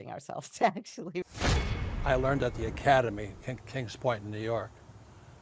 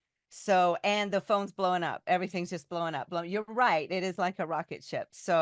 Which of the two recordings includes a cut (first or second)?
first